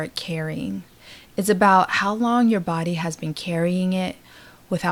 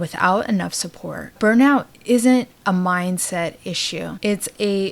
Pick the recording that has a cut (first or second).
second